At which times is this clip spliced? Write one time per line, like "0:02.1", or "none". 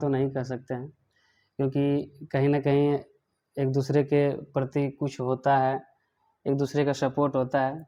none